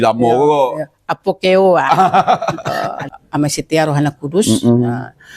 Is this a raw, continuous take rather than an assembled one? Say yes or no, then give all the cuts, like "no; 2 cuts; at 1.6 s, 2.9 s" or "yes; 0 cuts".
no; 1 cut; at 2.6 s